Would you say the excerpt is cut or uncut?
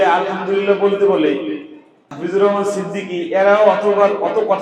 cut